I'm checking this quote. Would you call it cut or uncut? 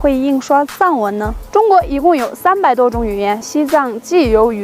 cut